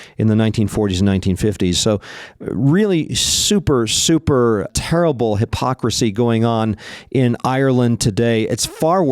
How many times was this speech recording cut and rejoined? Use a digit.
1